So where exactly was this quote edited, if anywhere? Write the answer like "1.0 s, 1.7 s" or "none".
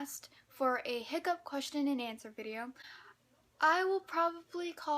none